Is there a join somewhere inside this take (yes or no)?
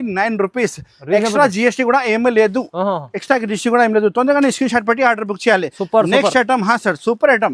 no